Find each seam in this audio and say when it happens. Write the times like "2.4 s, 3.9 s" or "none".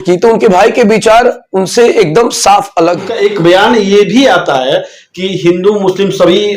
3.1 s